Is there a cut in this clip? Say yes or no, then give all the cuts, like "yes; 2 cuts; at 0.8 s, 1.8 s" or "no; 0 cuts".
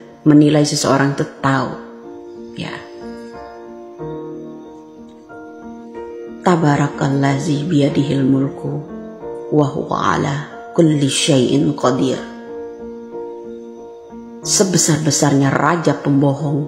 no; 0 cuts